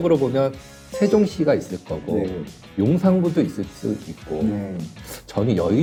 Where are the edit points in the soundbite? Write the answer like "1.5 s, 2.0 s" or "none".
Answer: none